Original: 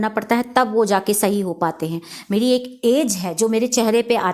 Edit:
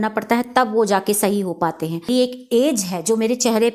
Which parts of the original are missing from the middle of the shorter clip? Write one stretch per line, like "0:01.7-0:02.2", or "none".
0:02.1-0:02.4